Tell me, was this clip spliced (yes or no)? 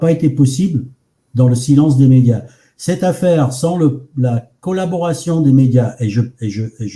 no